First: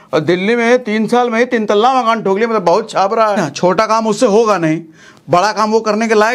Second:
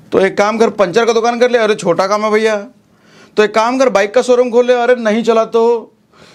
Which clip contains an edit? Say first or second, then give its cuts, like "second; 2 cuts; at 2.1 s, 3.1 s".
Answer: first; 1 cut; at 3.4 s